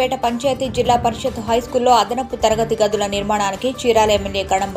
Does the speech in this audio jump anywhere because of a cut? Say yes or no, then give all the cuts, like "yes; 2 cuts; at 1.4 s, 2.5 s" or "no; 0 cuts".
no; 0 cuts